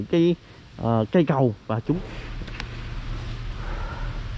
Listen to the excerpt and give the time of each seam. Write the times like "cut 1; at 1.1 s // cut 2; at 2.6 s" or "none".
cut 1; at 1.9 s